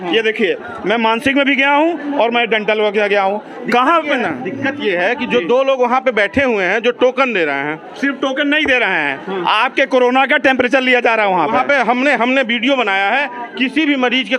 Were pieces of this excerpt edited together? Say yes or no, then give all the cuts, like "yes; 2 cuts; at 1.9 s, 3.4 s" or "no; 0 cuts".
no; 0 cuts